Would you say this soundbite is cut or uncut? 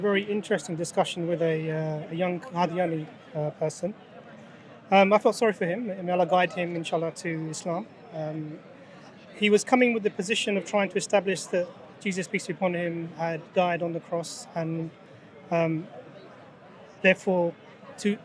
uncut